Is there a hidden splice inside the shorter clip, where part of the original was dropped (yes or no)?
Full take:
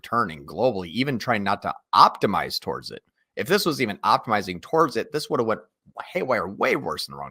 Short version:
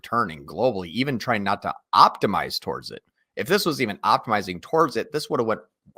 no